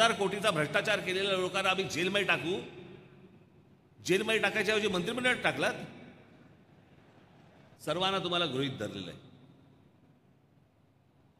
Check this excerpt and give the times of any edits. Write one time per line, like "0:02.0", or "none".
0:07.8